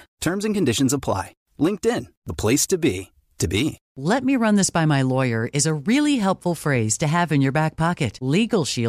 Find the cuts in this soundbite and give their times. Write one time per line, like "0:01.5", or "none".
0:03.9